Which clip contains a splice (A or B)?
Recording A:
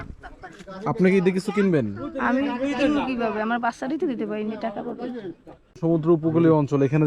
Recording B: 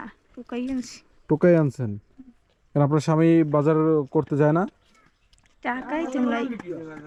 A